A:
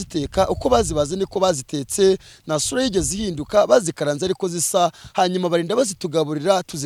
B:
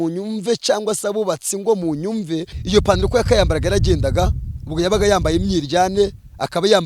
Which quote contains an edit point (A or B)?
B